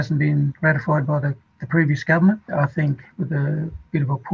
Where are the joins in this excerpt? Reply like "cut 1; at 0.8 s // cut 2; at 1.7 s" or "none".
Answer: cut 1; at 1.5 s // cut 2; at 2.5 s

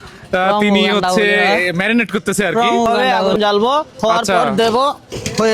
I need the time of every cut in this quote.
cut 1; at 2.9 s

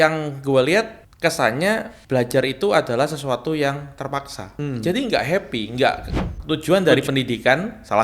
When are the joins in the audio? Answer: cut 1; at 1.0 s // cut 2; at 1.9 s // cut 3; at 4.5 s // cut 4; at 6.3 s

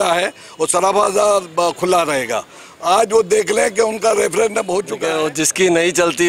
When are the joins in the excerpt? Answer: cut 1; at 4.9 s

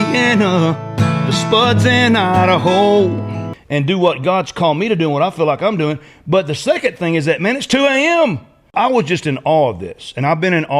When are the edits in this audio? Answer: cut 1; at 3.6 s // cut 2; at 8.7 s

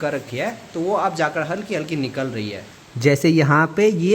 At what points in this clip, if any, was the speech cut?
cut 1; at 2.7 s

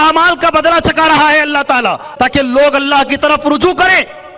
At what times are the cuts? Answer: cut 1; at 2.0 s

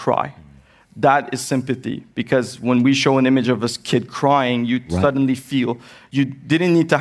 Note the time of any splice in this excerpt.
none

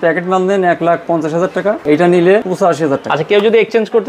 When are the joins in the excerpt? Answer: cut 1; at 1.8 s // cut 2; at 3.0 s

